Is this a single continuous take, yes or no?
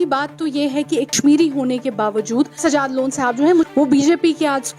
no